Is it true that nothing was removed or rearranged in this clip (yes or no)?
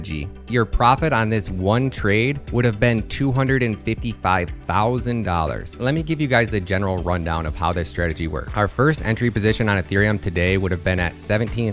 no